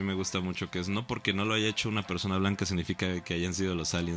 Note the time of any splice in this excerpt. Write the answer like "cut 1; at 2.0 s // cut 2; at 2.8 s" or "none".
none